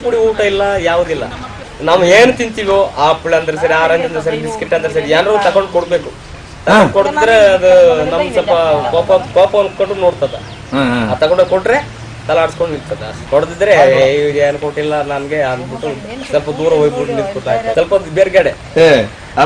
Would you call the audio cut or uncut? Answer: cut